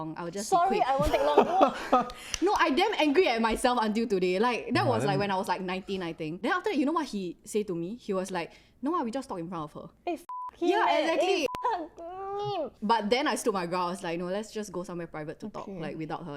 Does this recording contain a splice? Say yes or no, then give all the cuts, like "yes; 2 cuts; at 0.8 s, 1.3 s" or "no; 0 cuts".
no; 0 cuts